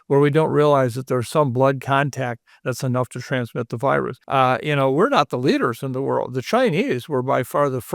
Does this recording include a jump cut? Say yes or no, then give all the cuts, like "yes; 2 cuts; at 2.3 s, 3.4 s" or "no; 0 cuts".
yes; 1 cut; at 4.2 s